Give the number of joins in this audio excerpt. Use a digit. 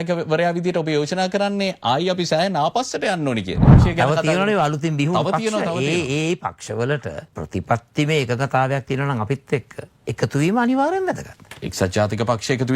1